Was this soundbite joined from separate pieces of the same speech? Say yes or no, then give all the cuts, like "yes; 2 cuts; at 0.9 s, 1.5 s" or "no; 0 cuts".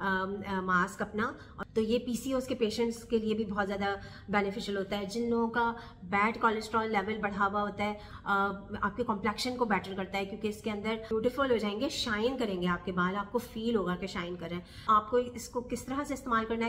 yes; 4 cuts; at 1.6 s, 8.1 s, 11.1 s, 14.8 s